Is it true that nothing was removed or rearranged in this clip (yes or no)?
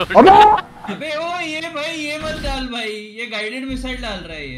yes